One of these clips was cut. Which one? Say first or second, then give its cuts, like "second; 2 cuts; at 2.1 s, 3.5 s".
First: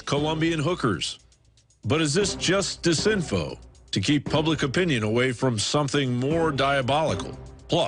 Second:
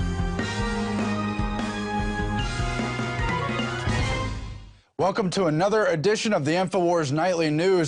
second; 1 cut; at 3.9 s